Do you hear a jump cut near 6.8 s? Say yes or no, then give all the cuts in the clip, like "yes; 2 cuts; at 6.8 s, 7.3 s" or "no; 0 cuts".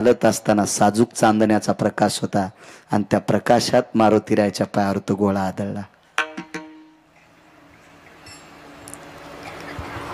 yes; 1 cut; at 6.8 s